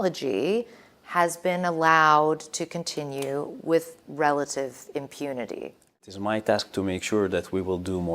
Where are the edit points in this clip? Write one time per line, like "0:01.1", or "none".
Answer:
0:06.0